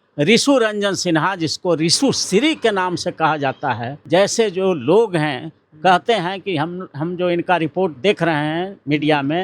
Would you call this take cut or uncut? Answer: cut